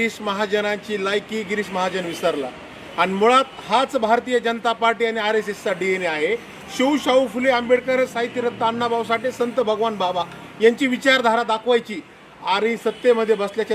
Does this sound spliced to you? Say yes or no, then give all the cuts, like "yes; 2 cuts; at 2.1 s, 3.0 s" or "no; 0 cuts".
no; 0 cuts